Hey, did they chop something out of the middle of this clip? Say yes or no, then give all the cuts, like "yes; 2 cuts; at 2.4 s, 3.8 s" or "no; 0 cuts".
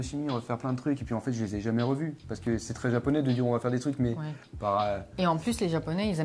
no; 0 cuts